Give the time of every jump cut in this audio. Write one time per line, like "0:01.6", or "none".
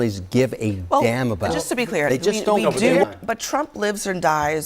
0:03.0